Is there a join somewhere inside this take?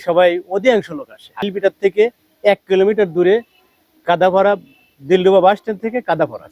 yes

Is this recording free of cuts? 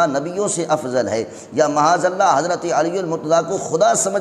yes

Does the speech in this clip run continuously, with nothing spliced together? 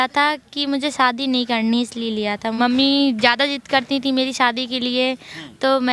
no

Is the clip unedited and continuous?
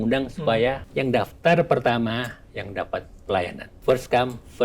no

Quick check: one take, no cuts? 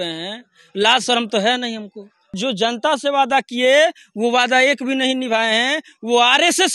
no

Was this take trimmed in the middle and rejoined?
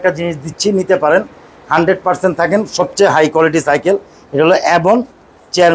no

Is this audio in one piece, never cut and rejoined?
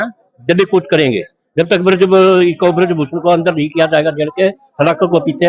yes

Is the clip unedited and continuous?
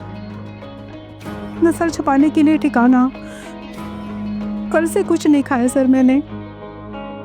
yes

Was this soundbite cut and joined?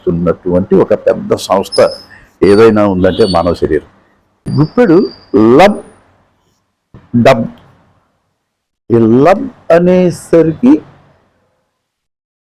yes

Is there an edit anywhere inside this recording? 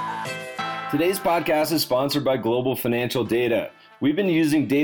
yes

